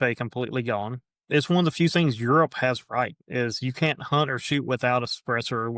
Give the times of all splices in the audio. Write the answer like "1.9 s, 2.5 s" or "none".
1.1 s